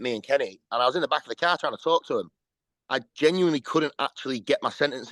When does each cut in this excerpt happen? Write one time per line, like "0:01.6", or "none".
none

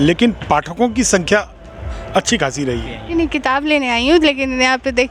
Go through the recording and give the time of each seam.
0:03.0

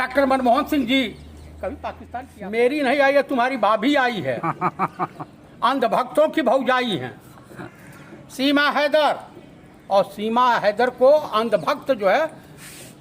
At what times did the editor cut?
0:02.0

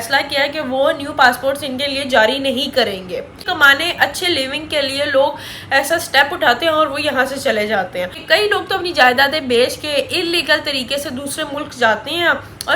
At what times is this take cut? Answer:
0:03.4
0:08.2

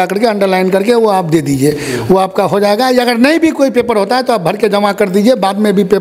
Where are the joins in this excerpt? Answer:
none

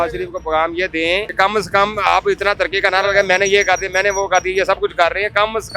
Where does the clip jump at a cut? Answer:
0:01.3

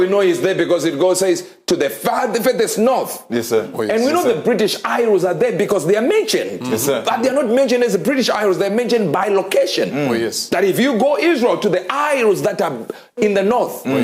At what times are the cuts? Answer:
0:04.8

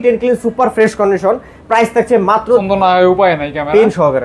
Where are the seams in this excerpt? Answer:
0:02.6

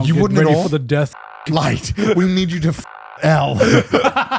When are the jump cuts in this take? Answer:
0:01.2

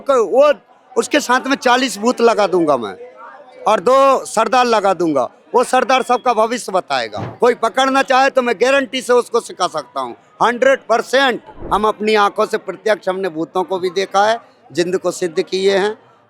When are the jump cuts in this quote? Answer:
0:07.2
0:11.5

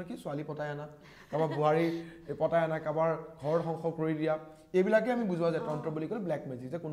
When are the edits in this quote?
none

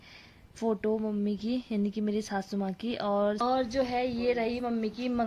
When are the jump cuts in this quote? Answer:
0:03.4

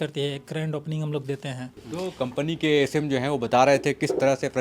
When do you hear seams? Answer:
0:01.8

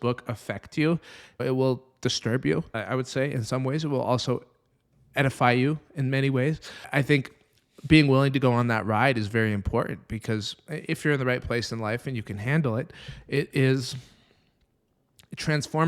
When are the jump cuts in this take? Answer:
0:01.4
0:02.7
0:06.9

